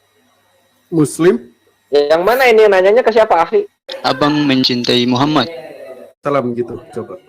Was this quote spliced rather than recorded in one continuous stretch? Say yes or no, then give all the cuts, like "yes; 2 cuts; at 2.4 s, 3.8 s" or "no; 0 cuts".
yes; 2 cuts; at 3.8 s, 6.2 s